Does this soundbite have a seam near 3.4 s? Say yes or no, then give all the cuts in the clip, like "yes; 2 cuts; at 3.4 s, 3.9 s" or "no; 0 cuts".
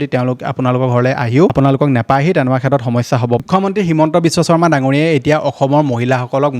yes; 2 cuts; at 1.5 s, 3.4 s